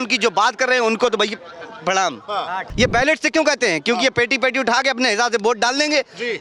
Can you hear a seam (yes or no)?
yes